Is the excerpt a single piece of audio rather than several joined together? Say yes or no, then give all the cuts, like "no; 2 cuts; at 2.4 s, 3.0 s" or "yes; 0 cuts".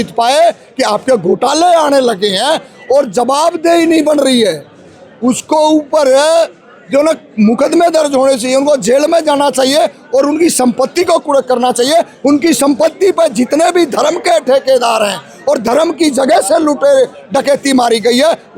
yes; 0 cuts